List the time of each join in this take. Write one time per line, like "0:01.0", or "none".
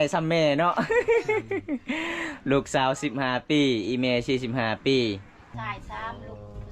0:05.5